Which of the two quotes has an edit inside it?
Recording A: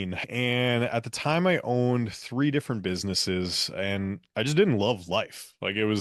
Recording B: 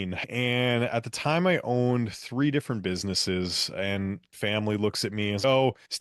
B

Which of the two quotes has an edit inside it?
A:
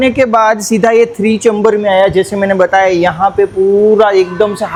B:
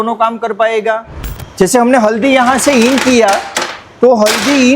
B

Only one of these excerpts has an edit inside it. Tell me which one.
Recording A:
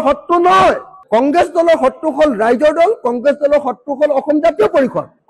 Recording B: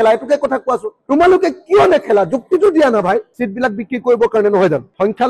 B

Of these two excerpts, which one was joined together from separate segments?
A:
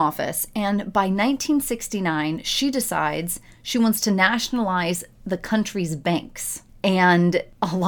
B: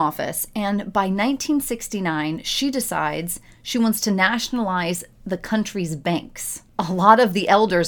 B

